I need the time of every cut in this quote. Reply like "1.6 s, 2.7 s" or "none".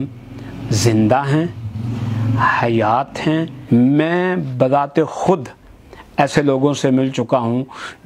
3.5 s